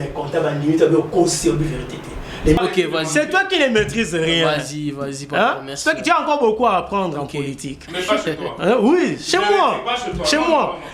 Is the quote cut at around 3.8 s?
no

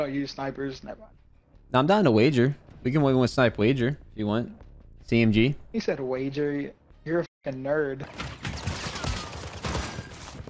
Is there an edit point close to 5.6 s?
no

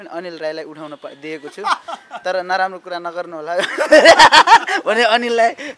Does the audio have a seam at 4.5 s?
no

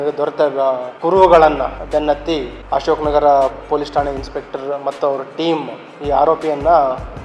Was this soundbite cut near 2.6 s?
yes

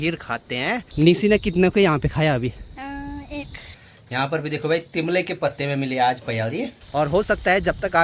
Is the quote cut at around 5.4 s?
no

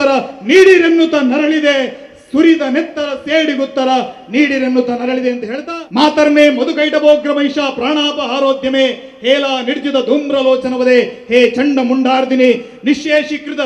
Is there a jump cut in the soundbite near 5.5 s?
yes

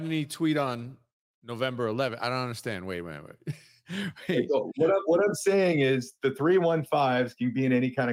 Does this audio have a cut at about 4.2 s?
no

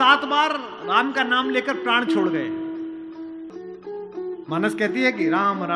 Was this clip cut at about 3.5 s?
yes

